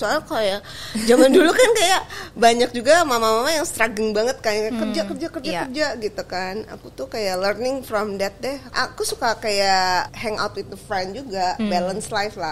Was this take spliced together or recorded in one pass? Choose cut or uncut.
cut